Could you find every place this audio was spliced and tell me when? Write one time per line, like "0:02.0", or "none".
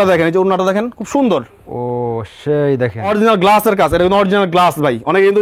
0:03.1